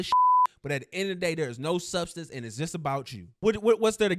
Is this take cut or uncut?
cut